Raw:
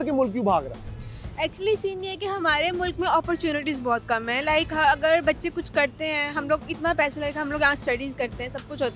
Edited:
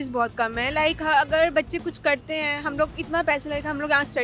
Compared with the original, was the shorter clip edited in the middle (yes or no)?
no